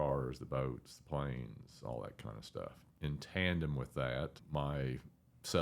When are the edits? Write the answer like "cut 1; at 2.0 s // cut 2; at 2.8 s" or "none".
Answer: cut 1; at 2.8 s // cut 2; at 4.4 s